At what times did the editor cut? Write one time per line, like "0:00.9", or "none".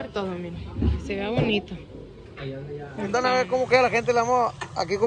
0:03.1